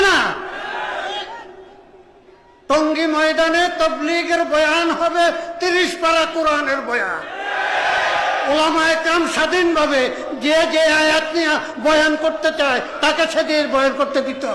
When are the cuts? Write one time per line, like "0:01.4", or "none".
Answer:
none